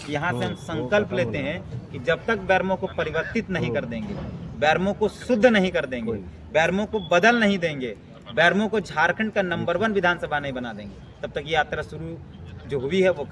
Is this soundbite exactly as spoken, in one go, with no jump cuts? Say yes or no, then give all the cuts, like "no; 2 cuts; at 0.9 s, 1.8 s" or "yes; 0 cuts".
yes; 0 cuts